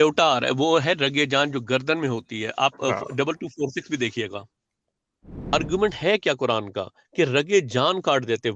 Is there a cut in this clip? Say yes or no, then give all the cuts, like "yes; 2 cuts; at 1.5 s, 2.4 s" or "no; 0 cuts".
yes; 1 cut; at 5.5 s